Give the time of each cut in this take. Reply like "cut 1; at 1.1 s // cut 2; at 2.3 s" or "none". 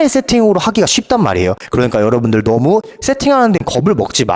cut 1; at 1.6 s // cut 2; at 3.6 s